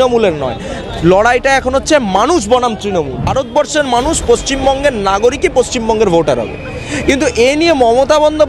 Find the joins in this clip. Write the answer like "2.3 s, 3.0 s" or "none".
3.2 s